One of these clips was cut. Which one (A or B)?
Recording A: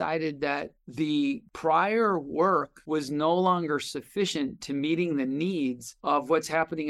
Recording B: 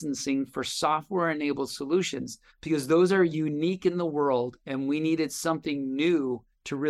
A